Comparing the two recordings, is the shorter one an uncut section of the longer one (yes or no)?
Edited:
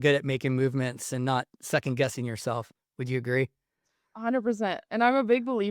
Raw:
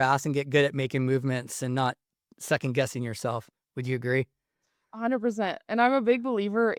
no